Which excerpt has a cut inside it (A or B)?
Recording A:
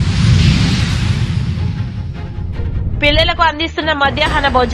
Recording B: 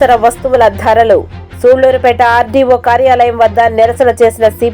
A